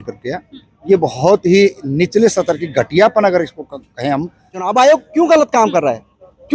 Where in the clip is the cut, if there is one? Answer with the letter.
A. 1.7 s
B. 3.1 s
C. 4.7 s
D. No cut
C